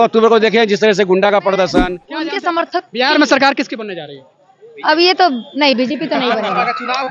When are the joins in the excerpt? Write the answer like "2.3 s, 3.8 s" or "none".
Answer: 2.3 s